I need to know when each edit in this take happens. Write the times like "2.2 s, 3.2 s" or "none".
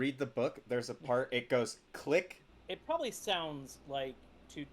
2.4 s